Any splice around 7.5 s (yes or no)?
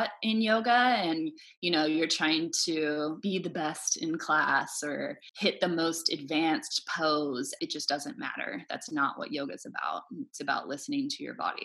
yes